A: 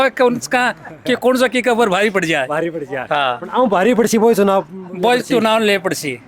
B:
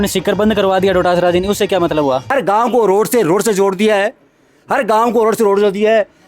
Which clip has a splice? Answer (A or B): B